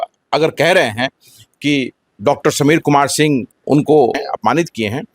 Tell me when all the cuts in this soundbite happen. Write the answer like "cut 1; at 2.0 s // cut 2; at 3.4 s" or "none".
cut 1; at 3.5 s // cut 2; at 4.2 s